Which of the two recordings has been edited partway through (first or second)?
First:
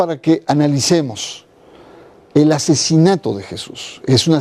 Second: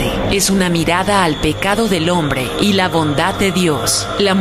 second